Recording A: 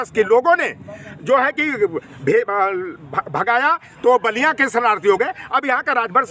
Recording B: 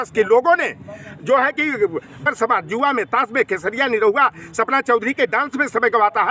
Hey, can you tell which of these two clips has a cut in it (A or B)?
B